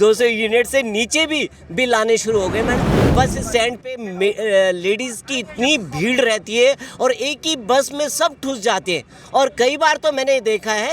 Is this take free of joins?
no; 1 cut; at 3.0 s

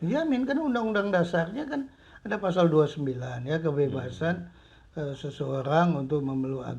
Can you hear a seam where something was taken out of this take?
no; 0 cuts

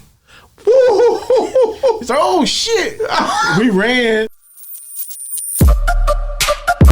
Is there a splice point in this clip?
yes; 1 cut; at 4.4 s

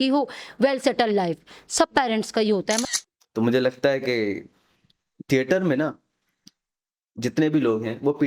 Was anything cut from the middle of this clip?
yes; 1 cut; at 2.8 s

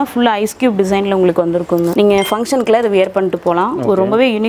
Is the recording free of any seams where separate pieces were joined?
no; 1 cut; at 1.9 s

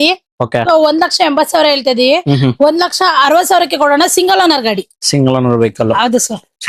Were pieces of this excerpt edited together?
no; 0 cuts

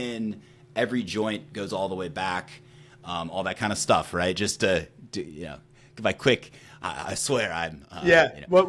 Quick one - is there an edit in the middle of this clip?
no; 0 cuts

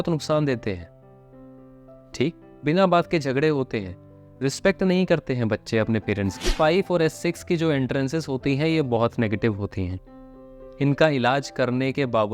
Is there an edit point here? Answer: yes; 1 cut; at 6.5 s

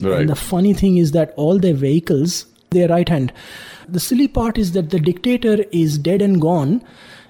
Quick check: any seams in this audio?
yes; 1 cut; at 3.8 s

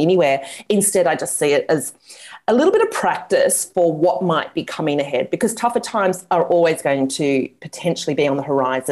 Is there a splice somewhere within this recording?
yes; 1 cut; at 7.6 s

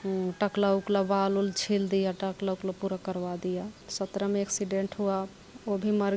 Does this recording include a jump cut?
yes; 1 cut; at 3.8 s

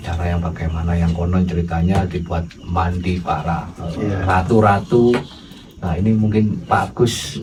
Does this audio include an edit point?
no; 0 cuts

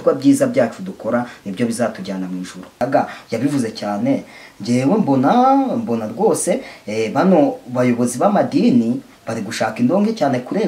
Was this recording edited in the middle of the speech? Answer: yes; 1 cut; at 2.7 s

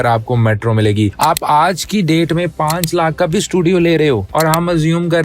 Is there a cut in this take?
yes; 1 cut; at 1.1 s

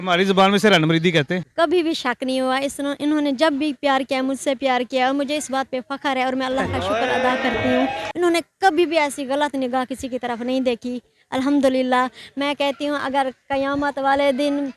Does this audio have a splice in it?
yes; 2 cuts; at 1.5 s, 6.0 s

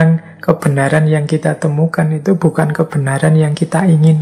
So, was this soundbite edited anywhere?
no; 0 cuts

